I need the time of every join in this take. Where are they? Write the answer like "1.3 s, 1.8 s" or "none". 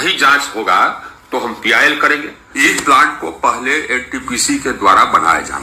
2.6 s